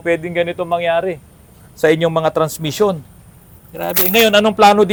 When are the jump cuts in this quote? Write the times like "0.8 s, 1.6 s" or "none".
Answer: none